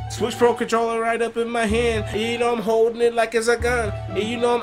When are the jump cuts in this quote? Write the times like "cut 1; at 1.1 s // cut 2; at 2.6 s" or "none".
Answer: cut 1; at 2.1 s